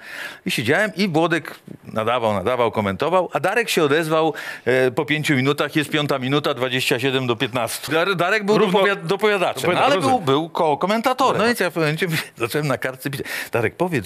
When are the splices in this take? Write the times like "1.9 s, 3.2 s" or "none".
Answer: 7.9 s, 11.4 s